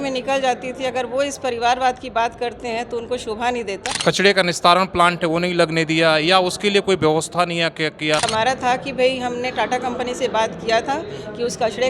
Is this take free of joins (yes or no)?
no